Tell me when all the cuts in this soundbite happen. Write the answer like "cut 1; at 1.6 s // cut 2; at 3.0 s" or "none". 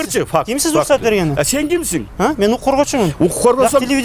none

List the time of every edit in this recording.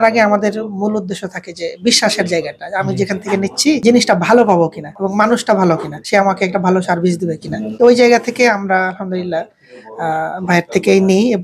none

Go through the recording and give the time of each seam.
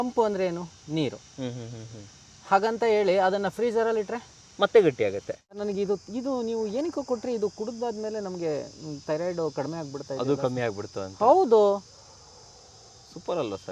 cut 1; at 5.6 s

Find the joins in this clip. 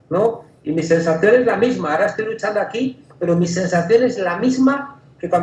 cut 1; at 3.7 s

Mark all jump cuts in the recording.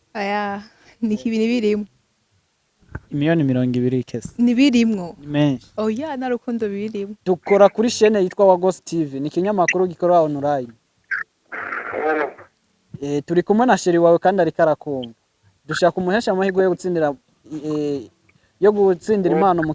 cut 1; at 7.1 s

